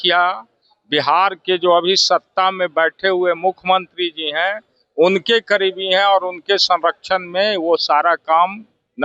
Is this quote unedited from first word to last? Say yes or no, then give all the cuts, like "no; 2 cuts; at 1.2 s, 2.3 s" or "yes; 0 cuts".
yes; 0 cuts